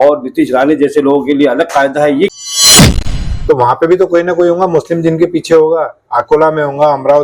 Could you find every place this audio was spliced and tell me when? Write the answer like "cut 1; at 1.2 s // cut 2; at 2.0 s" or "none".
cut 1; at 2.8 s